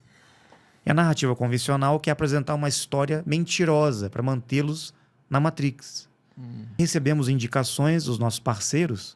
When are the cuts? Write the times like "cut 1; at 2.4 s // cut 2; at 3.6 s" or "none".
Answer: cut 1; at 6.8 s